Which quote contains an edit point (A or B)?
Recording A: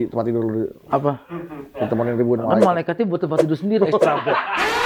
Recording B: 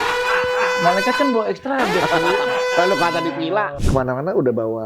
B